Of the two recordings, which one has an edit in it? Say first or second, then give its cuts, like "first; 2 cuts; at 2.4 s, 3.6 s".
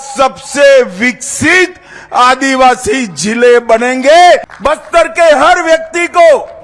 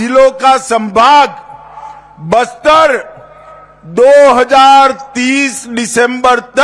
first; 1 cut; at 4.5 s